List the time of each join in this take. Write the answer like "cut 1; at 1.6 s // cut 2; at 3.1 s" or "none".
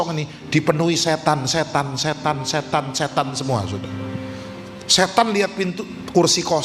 none